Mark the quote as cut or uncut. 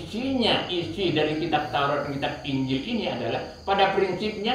uncut